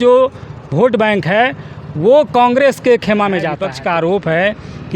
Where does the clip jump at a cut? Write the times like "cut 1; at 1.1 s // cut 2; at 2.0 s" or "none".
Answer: cut 1; at 3.7 s